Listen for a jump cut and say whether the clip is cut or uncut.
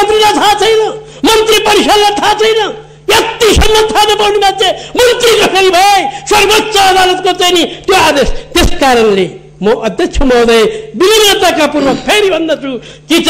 uncut